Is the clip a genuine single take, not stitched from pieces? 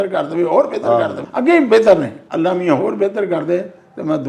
no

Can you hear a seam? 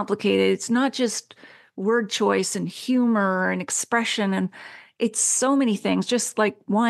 no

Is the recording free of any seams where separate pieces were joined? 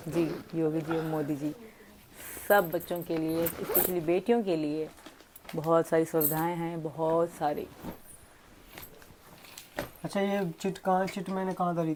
yes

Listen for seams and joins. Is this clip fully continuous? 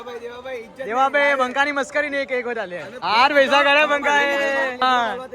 no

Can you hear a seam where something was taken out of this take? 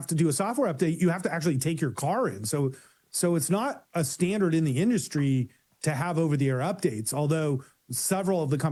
no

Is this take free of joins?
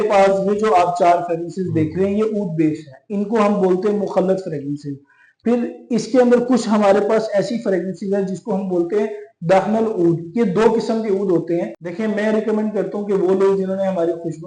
no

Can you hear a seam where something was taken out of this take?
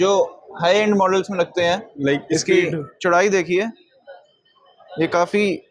no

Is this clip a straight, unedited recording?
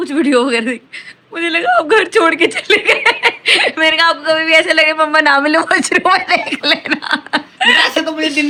yes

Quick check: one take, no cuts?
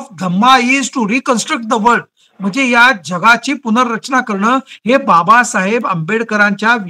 yes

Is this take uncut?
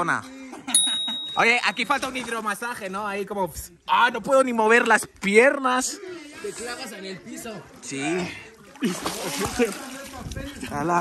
yes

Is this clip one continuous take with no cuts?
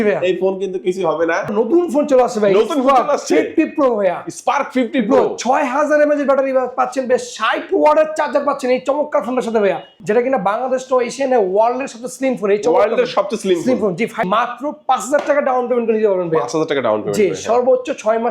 no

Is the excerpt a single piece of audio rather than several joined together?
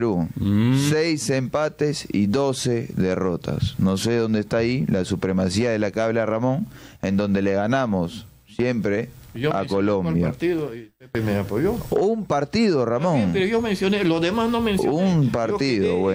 yes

